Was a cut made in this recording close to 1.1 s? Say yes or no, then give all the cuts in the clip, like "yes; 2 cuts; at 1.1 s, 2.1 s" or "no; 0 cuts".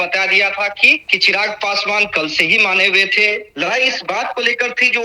yes; 2 cuts; at 1.1 s, 3.5 s